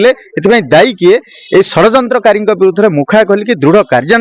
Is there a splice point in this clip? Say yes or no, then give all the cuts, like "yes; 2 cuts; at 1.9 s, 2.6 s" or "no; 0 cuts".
no; 0 cuts